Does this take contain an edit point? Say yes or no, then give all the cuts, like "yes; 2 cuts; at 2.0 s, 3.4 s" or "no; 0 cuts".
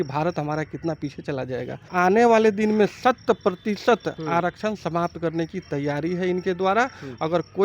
yes; 1 cut; at 1.9 s